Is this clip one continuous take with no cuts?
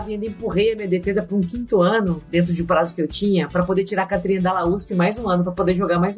yes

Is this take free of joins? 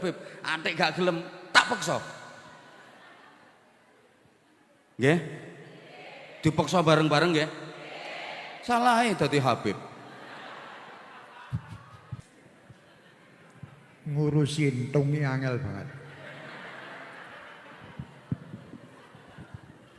no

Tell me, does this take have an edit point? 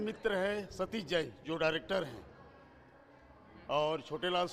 no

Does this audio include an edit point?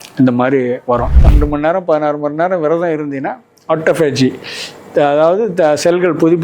yes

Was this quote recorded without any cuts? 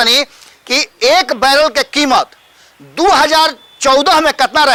yes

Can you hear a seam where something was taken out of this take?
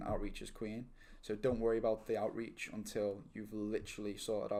no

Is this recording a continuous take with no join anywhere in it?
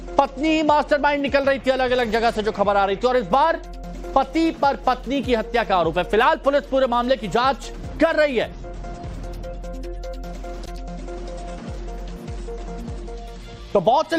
yes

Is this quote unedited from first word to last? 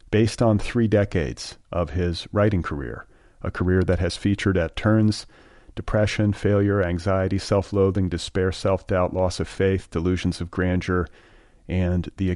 yes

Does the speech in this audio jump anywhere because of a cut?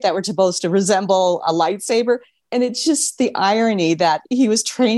no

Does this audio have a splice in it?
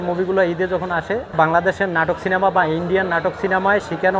yes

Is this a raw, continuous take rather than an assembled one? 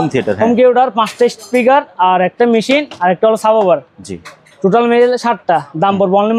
yes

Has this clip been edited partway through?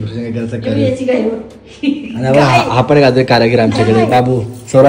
no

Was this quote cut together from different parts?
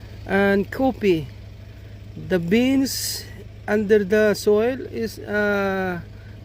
no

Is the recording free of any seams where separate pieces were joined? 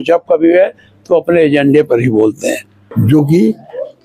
no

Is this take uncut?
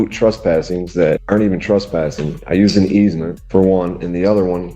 no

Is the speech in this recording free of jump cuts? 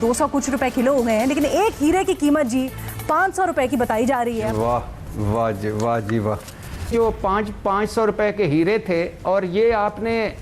no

